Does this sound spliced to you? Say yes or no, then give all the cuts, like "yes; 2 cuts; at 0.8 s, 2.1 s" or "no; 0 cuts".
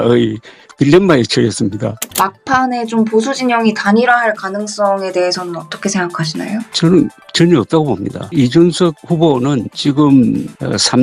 yes; 1 cut; at 1.9 s